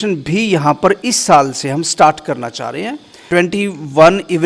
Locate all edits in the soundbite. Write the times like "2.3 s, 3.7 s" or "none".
3.5 s